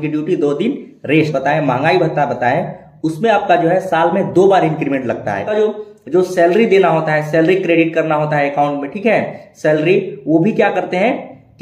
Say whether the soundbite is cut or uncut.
cut